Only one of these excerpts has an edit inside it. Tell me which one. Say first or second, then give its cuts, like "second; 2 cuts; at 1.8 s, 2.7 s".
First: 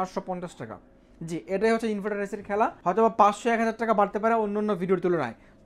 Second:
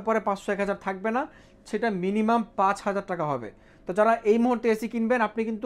first; 1 cut; at 2.8 s